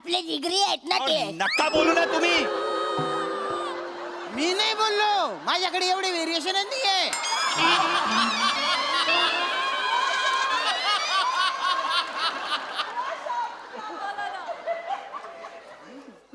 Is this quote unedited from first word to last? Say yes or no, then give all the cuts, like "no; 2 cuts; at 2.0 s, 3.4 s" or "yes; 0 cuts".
yes; 0 cuts